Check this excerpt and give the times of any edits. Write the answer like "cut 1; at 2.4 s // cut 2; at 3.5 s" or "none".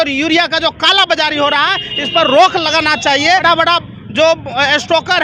cut 1; at 3.4 s